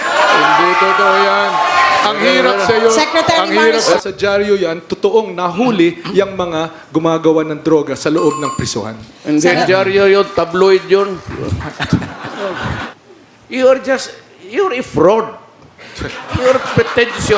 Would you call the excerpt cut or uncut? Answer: cut